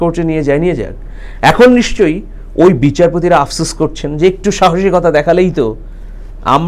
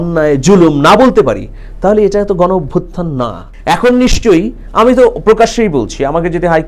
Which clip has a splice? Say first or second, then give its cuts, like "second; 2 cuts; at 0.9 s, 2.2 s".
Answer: second; 1 cut; at 3.4 s